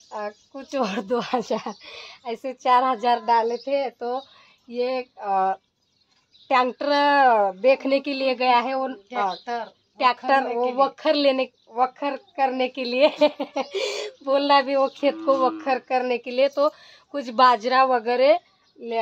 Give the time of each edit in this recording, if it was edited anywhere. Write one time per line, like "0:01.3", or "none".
none